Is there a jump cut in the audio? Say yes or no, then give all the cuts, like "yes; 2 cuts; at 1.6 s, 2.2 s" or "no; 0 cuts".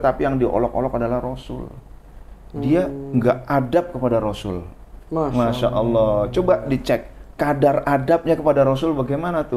no; 0 cuts